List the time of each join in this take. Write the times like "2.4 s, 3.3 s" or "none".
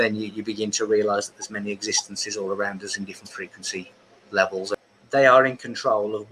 4.9 s